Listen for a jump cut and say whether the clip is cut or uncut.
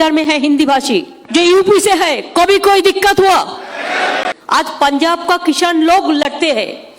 cut